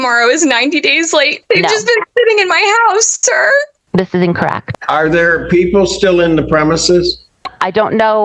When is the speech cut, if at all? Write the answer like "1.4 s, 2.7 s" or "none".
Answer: 1.4 s, 4.6 s